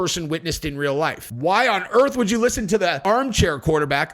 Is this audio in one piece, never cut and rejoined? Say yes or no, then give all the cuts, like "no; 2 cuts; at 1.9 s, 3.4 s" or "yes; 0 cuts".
no; 2 cuts; at 1.3 s, 3.0 s